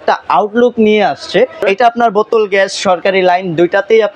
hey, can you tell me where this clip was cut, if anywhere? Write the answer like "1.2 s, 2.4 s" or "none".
1.6 s

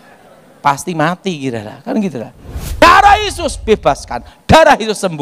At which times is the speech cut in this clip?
2.8 s

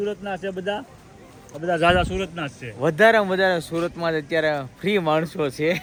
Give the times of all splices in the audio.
none

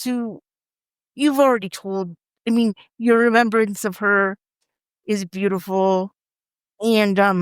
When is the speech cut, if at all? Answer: 6.4 s

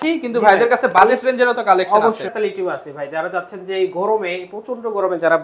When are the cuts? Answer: 2.2 s

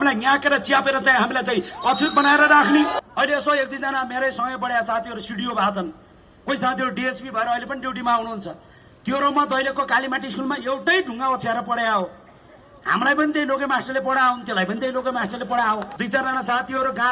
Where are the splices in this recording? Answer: 2.9 s, 15.9 s

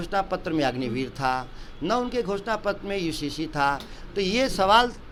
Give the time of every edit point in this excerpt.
none

